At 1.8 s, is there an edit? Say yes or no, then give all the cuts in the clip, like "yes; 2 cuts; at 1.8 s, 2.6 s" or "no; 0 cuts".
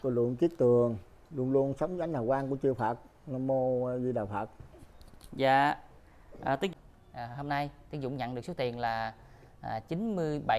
no; 1 cut; at 6.7 s